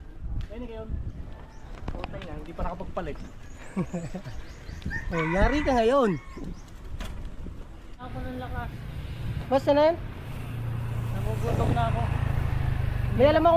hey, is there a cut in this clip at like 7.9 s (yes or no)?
yes